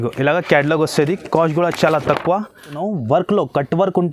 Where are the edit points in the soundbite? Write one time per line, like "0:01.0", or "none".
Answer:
0:02.8